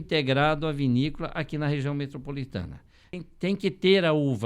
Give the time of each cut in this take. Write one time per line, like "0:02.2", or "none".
0:03.2

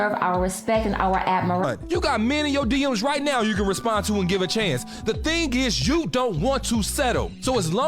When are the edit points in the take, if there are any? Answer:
0:01.6

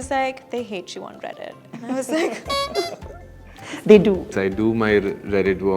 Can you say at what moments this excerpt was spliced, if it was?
0:04.3

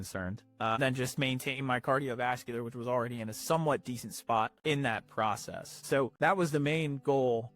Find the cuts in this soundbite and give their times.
0:04.5
0:06.1

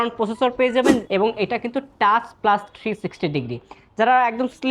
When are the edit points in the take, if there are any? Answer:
0:01.0

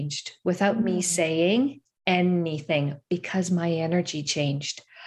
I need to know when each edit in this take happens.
none

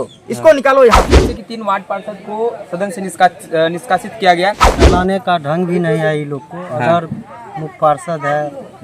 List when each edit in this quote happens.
0:01.1
0:04.8

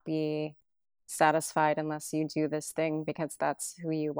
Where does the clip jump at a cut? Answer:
none

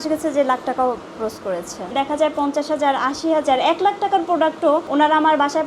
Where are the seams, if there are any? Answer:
0:01.9

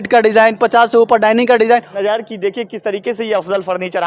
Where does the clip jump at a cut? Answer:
0:01.9

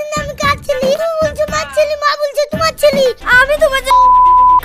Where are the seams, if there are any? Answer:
0:03.2

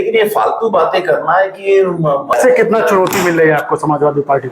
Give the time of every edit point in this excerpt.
0:02.3

